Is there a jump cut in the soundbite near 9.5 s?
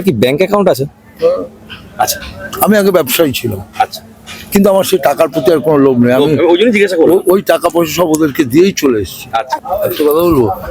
yes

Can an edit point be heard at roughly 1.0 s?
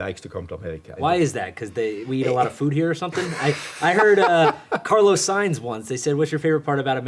yes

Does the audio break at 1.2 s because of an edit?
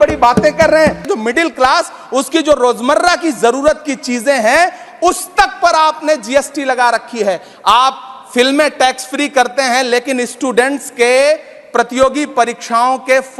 no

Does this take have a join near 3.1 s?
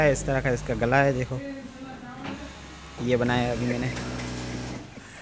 no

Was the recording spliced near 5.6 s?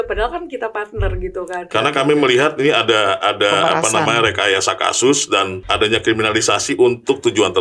yes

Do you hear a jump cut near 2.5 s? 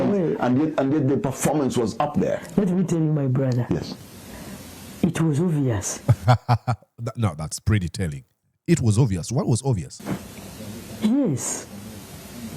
no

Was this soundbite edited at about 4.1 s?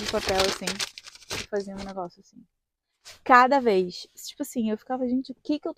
no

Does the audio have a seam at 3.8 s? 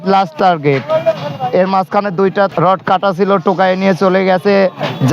no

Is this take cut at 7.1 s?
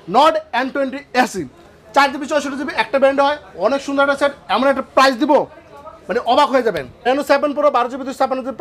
yes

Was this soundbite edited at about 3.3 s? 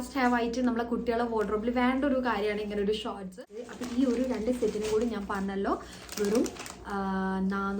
yes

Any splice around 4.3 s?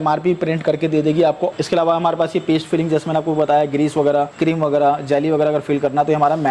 yes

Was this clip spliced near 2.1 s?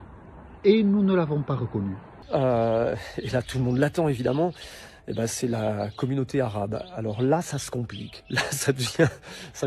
yes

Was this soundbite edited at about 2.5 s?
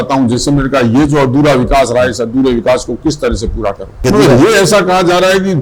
no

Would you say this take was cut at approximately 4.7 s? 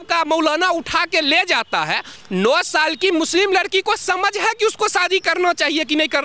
no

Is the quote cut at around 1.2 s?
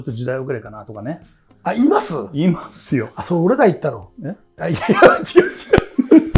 no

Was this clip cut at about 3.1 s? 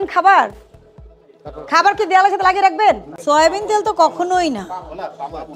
yes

